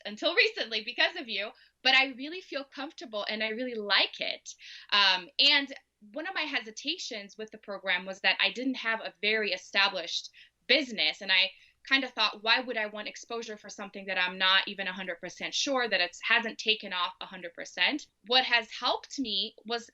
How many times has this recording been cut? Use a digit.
1